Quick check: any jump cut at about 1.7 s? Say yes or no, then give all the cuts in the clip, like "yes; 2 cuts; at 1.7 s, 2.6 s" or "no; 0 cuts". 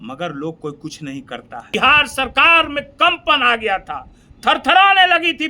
yes; 1 cut; at 1.7 s